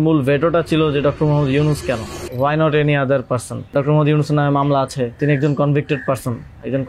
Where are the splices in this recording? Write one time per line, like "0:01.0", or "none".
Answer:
0:02.2
0:03.7
0:05.2